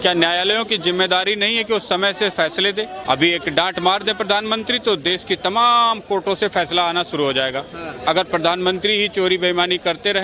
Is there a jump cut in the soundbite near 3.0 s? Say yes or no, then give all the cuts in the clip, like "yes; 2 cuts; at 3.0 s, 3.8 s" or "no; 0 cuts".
yes; 1 cut; at 3.0 s